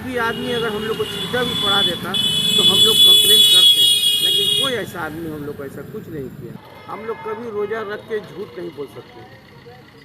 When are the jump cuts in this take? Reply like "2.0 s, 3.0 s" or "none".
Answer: 6.7 s